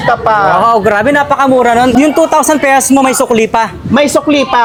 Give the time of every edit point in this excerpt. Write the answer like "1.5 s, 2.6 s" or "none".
none